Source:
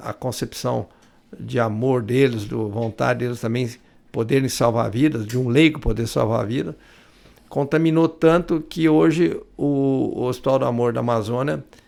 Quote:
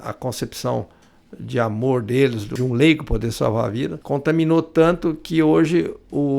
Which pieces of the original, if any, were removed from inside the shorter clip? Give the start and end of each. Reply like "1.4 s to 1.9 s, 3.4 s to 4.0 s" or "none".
2.5 s to 5.2 s, 6.7 s to 7.4 s

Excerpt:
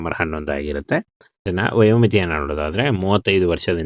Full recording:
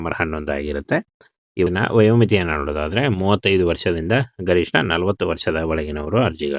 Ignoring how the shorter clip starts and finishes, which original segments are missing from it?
1.5 s to 1.7 s

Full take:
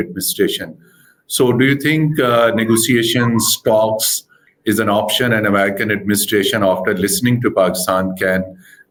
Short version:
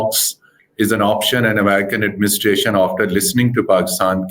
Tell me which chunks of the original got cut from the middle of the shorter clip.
none

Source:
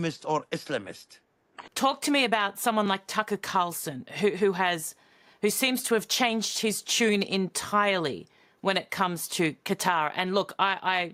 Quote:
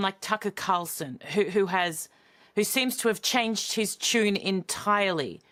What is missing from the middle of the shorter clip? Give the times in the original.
none

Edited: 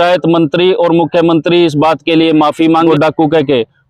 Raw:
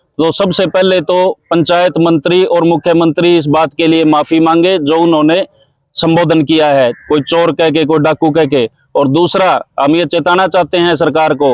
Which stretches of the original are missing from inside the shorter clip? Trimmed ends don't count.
4.6 s to 7.9 s

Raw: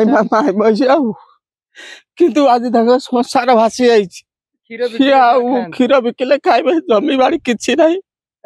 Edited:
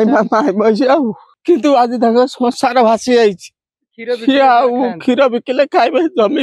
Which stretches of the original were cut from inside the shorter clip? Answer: 1.3 s to 2.0 s

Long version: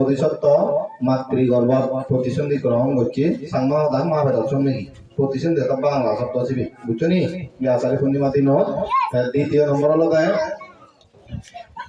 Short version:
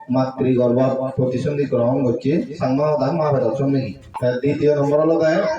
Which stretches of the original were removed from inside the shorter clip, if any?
5.3 s to 9.2 s

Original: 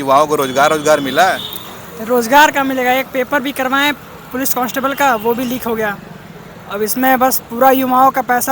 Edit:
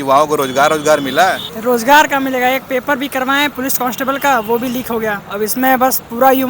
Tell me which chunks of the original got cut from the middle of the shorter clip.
1.5 s to 1.9 s, 4.0 s to 4.3 s, 6.0 s to 6.6 s

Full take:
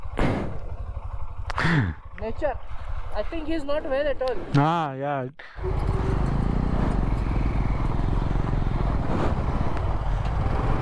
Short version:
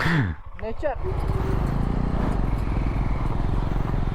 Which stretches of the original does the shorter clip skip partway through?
2.6 s to 5.6 s

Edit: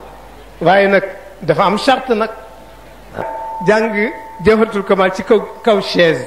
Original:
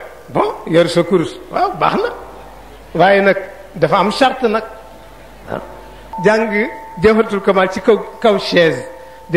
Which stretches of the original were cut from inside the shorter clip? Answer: 5.7 s to 5.9 s

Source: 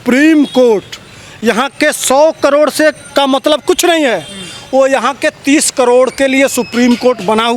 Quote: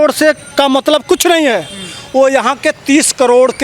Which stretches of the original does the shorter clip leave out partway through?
none

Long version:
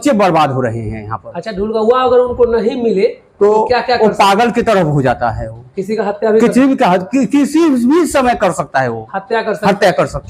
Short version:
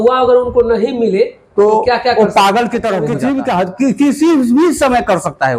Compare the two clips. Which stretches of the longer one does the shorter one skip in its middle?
5.0 s to 6.5 s

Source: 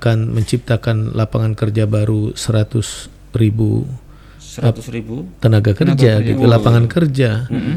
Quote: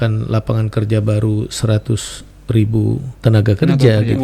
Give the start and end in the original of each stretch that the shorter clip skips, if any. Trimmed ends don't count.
4.0 s to 5.3 s

